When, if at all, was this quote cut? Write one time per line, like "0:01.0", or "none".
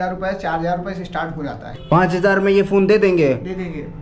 0:01.7